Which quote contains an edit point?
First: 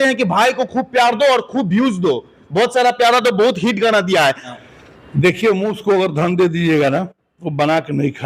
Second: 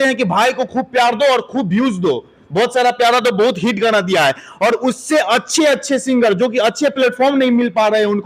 first; 1 cut; at 4.5 s

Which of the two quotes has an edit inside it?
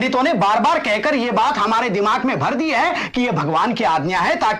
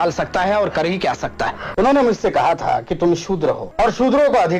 second; 2 cuts; at 1.6 s, 3.7 s

